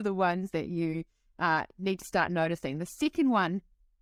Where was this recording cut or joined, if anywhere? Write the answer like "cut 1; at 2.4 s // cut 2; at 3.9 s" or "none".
none